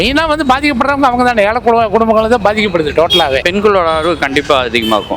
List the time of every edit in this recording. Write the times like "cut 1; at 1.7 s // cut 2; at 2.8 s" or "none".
cut 1; at 3.4 s